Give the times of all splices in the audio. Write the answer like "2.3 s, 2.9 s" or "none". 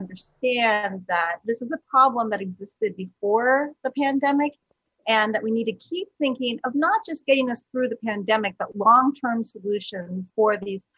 none